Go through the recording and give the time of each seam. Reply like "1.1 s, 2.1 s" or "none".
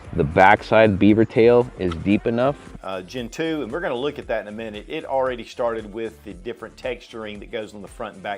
2.7 s